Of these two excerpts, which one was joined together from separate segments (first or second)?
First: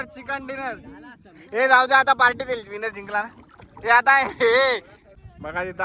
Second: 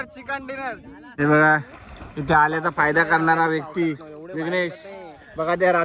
second